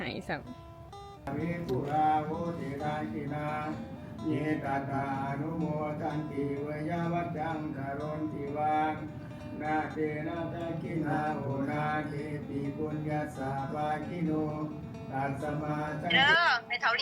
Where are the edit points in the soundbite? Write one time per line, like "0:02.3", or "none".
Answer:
0:01.2
0:16.1